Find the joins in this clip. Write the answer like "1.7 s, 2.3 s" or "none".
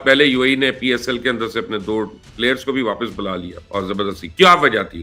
3.6 s